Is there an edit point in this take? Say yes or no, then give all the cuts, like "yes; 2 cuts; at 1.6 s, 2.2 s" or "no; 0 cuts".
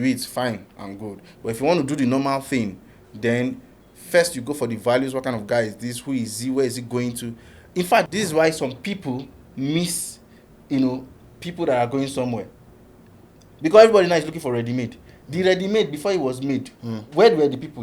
yes; 1 cut; at 8.1 s